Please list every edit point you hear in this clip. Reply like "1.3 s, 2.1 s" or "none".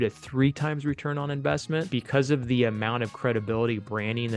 1.9 s

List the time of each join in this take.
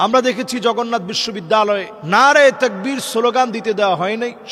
none

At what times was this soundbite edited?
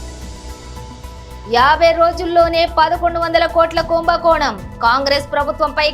1.0 s

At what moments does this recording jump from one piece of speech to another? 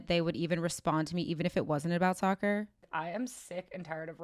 2.9 s

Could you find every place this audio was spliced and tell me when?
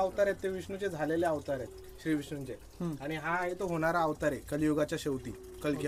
none

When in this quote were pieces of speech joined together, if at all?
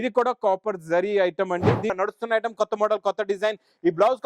1.9 s

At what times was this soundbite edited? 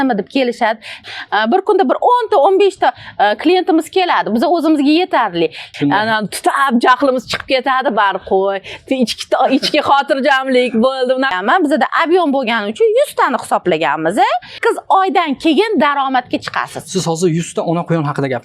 1.0 s, 5.6 s, 11.3 s, 14.5 s

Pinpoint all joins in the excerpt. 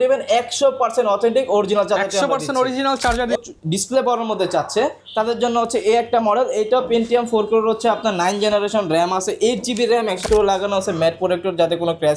3.4 s, 10.2 s

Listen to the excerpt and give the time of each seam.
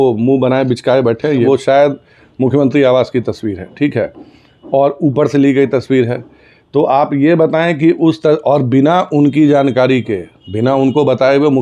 1.4 s

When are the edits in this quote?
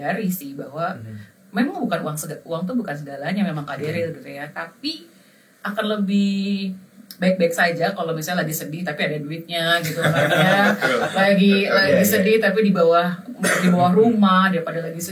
none

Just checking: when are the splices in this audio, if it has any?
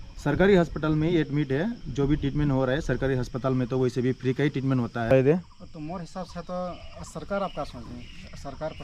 5.1 s

